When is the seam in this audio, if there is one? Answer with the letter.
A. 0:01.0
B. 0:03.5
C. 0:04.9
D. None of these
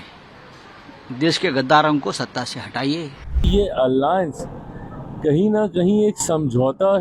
B